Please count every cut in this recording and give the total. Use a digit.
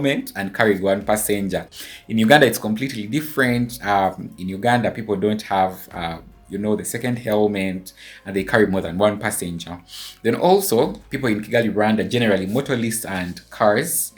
0